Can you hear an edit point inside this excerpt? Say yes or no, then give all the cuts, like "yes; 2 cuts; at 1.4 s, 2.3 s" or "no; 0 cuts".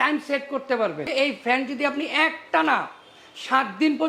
yes; 1 cut; at 1.0 s